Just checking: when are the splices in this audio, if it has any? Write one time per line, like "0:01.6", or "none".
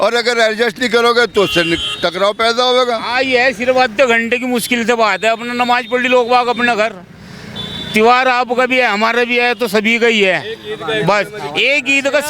none

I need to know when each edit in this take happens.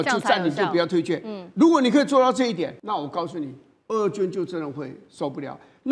0:02.8

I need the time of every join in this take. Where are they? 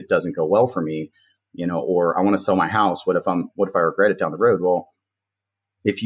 none

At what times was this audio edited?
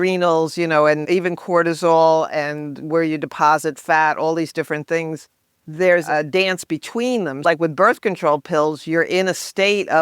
0:01.0
0:06.1
0:07.4

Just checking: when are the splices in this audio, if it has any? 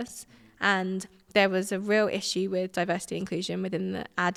none

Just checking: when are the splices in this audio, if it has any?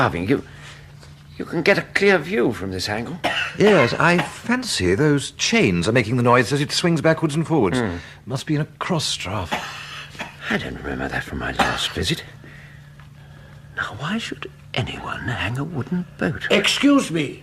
0:06.3

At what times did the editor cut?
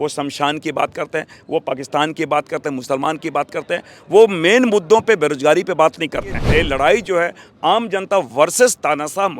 0:06.4

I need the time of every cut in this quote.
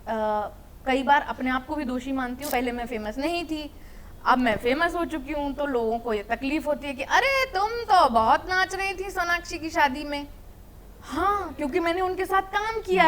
0:02.5

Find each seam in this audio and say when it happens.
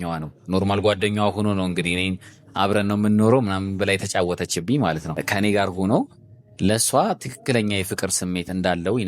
0:05.2

